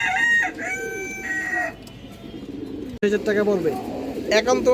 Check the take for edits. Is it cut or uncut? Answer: cut